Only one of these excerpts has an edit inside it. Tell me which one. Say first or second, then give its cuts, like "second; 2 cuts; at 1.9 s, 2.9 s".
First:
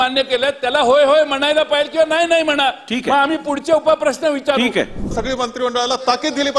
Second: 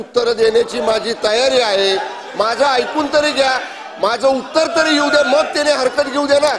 first; 1 cut; at 5.1 s